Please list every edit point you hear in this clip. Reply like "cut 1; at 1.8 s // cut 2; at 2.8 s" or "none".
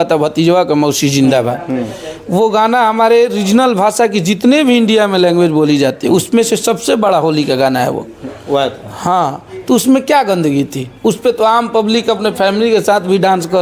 none